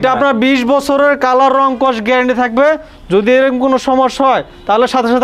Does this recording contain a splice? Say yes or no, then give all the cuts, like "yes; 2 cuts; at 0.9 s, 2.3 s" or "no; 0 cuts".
no; 0 cuts